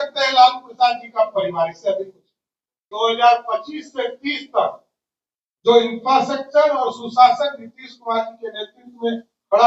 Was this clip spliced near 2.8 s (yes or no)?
yes